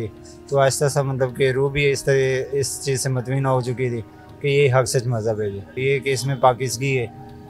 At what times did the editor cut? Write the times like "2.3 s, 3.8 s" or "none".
5.7 s